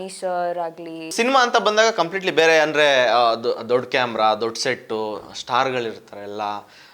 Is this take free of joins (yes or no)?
no